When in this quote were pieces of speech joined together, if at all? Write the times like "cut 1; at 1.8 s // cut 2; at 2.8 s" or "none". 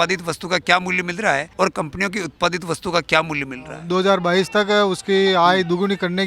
cut 1; at 1.5 s // cut 2; at 3.7 s